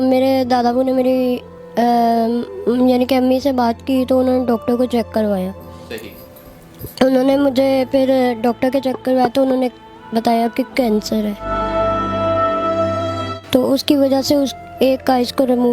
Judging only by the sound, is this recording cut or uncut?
uncut